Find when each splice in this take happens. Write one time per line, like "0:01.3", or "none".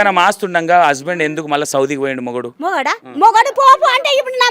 0:02.8